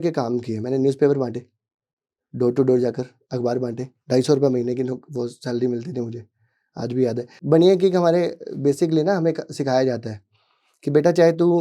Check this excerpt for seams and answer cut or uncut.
cut